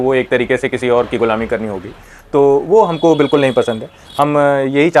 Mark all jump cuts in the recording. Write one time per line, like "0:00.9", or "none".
none